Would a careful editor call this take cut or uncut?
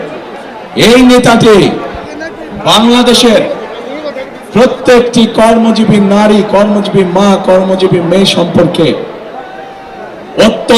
uncut